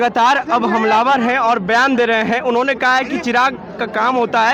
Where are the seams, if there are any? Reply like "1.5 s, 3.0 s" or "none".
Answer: none